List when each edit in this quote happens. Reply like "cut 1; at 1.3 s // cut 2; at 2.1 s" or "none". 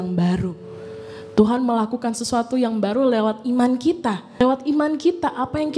cut 1; at 4.4 s